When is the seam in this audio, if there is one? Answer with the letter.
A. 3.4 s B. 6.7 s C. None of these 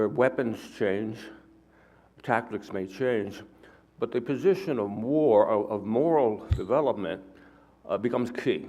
B